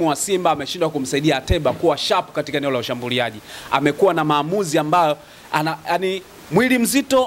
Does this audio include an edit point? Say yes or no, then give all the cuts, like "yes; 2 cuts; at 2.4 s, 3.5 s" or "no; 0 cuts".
no; 0 cuts